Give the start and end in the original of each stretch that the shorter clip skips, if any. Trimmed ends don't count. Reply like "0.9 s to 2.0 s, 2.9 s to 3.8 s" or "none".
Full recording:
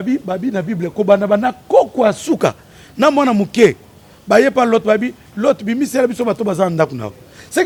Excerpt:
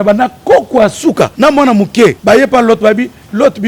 2.6 s to 2.9 s, 3.8 s to 4.2 s